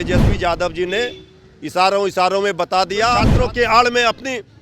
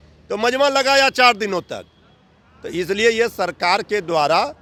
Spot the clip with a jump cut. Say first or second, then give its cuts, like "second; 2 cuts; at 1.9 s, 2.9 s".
first; 1 cut; at 3.3 s